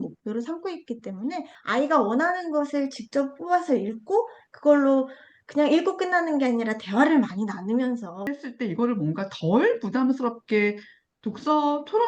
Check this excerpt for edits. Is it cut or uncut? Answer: cut